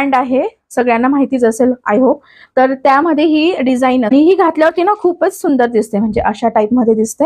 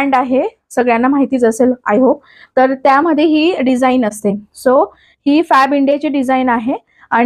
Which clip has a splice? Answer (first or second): first